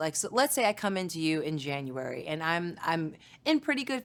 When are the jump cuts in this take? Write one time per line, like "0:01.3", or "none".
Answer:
none